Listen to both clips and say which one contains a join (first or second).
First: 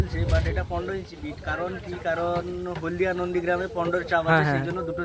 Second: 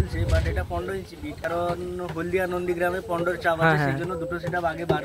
second